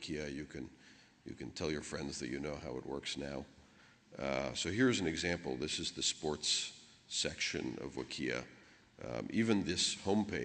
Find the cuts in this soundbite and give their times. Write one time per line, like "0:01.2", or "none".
0:03.9